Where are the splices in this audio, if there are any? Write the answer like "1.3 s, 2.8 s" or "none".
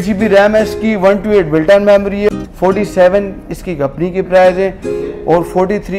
2.4 s

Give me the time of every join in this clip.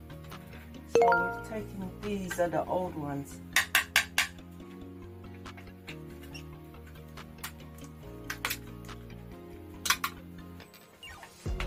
none

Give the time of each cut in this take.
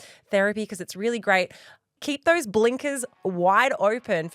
1.9 s, 3.2 s

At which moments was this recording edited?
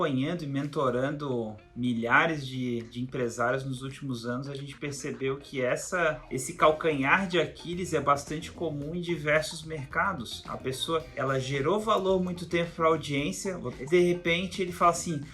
6.3 s, 11.1 s, 13.7 s

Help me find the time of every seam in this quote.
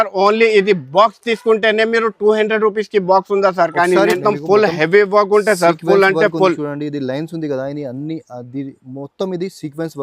4.2 s

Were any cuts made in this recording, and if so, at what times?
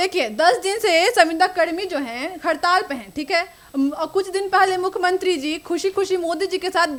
none

